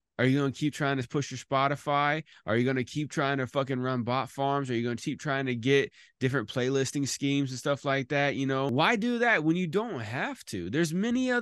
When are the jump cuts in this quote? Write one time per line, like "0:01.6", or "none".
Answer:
0:08.7